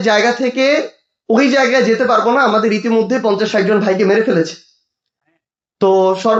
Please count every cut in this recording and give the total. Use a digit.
0